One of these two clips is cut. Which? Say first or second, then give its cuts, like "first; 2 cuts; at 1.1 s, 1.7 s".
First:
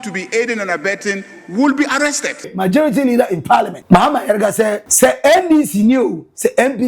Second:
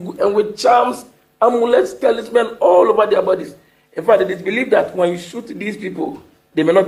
first; 3 cuts; at 2.5 s, 3.8 s, 4.8 s